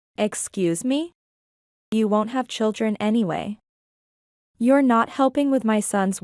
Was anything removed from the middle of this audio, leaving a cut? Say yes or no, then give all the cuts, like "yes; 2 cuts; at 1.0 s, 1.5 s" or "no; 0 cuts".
yes; 1 cut; at 1.9 s